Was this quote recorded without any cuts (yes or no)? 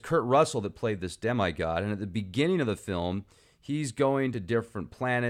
yes